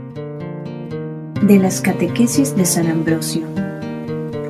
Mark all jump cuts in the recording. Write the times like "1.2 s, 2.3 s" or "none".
1.3 s